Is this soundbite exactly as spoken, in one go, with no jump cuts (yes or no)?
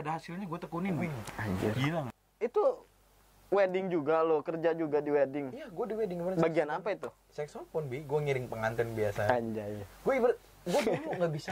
no